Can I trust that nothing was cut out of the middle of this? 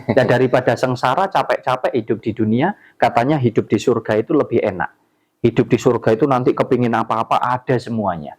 yes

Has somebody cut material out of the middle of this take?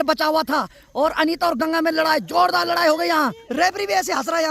yes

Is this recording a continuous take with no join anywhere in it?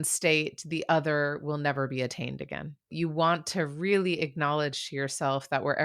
no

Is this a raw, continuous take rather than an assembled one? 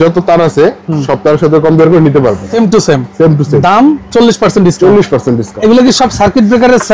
no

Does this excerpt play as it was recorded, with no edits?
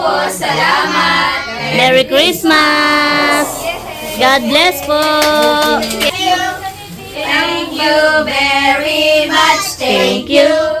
no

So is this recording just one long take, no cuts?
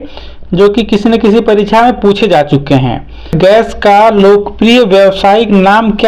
no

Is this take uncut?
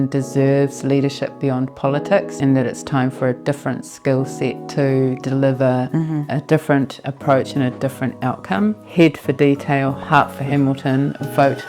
no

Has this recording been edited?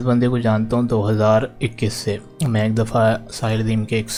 no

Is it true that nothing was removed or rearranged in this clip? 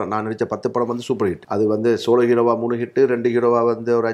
no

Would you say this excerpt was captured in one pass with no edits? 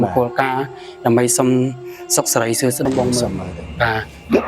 no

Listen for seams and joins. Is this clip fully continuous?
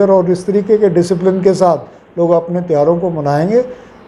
yes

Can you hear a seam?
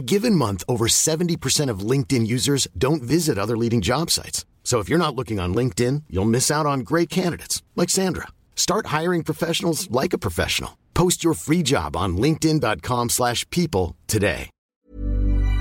yes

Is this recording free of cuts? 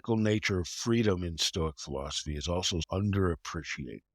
no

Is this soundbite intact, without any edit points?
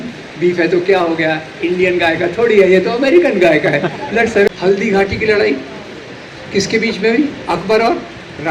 no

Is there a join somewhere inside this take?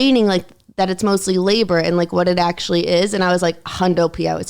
no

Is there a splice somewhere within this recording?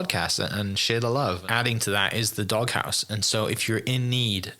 yes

